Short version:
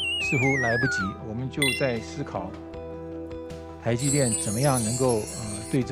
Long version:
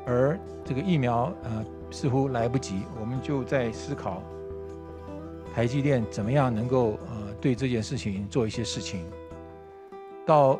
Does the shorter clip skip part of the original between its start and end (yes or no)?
no